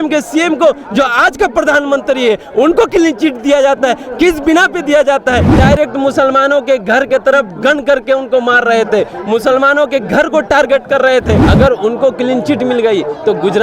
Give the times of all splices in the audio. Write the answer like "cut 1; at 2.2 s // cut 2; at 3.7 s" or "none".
cut 1; at 5.5 s // cut 2; at 11.5 s

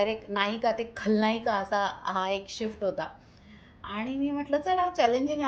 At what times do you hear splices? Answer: none

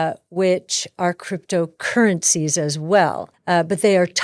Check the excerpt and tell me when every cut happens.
cut 1; at 3.3 s

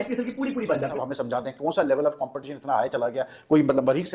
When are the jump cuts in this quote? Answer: cut 1; at 1.0 s

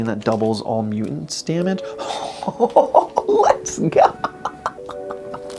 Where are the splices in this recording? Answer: none

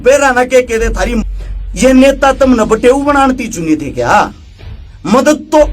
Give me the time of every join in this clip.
cut 1; at 1.2 s

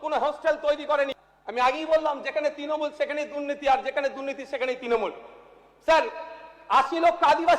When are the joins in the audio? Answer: cut 1; at 1.3 s

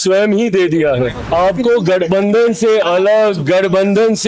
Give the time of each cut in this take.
cut 1; at 1.2 s

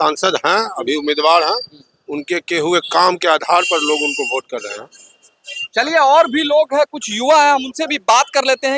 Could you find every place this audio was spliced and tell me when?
none

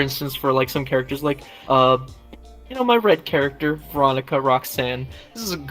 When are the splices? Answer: none

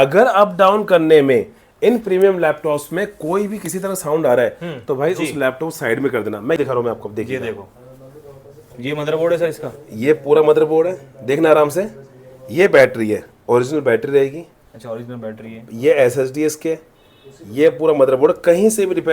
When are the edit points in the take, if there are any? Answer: cut 1; at 6.6 s

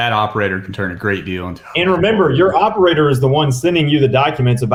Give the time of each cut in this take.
none

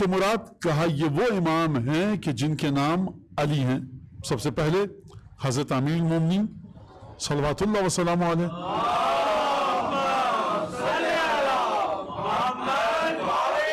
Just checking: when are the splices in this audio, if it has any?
none

